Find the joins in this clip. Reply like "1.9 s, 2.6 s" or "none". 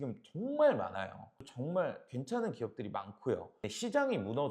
1.4 s